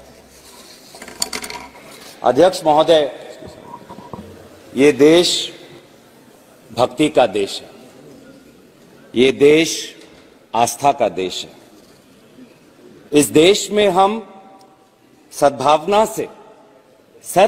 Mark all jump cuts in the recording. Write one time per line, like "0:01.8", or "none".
none